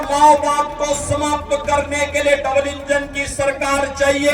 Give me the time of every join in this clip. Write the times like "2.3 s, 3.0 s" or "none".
none